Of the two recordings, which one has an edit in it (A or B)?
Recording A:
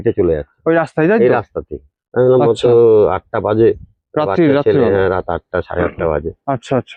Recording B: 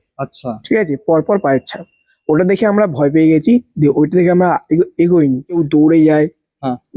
B